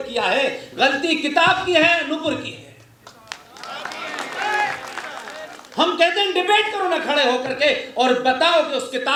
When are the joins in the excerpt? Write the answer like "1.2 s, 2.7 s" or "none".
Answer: none